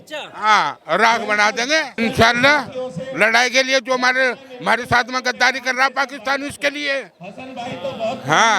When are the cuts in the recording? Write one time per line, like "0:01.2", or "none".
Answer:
0:01.9